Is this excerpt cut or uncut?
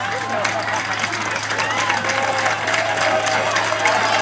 uncut